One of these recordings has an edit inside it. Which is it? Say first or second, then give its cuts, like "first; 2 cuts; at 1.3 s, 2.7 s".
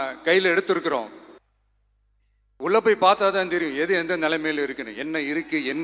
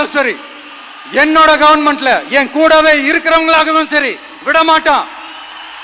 first; 1 cut; at 1.4 s